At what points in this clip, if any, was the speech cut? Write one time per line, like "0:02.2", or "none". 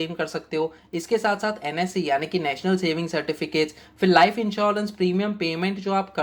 none